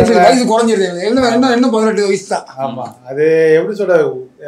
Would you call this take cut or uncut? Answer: uncut